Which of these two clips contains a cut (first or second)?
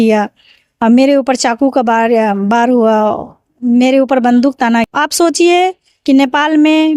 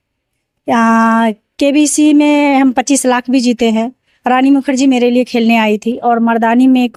first